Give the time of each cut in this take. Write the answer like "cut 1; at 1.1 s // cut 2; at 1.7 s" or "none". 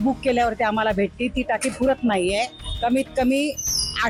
none